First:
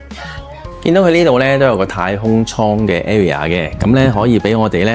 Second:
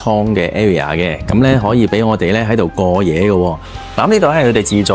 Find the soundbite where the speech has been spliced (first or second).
second